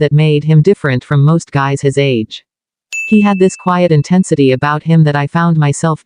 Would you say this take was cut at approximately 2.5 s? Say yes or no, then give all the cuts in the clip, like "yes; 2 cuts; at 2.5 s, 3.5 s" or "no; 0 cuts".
no; 0 cuts